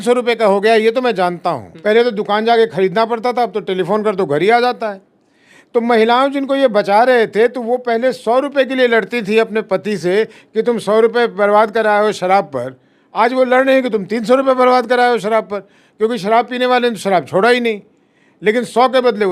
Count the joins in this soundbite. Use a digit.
0